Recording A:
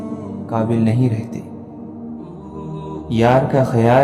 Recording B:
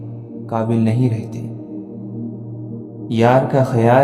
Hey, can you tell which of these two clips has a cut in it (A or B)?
B